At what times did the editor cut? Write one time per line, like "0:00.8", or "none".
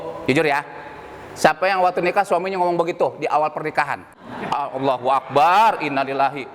0:04.5